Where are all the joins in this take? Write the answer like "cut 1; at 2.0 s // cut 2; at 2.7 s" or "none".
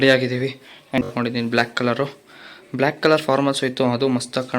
cut 1; at 1.0 s